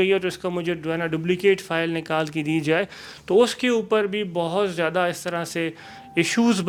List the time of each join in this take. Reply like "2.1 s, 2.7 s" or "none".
none